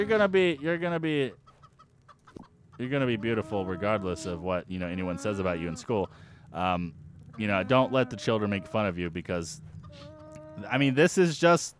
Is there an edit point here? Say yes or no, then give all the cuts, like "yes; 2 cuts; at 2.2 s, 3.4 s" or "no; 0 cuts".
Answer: no; 0 cuts